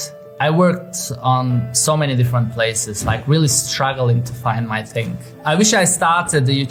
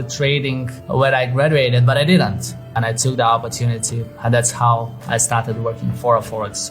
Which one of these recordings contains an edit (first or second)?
second